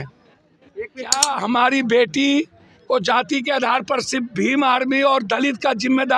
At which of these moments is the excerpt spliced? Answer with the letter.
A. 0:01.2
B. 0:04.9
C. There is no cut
A